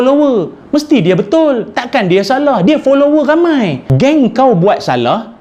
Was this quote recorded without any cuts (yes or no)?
no